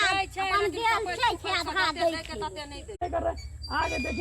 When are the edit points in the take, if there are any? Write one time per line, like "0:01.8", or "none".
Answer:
0:03.0